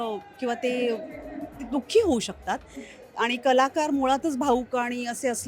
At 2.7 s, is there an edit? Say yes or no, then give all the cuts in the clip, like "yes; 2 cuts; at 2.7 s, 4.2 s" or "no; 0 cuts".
no; 0 cuts